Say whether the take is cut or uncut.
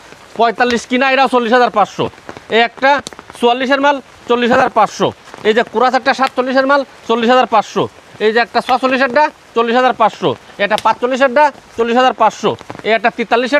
uncut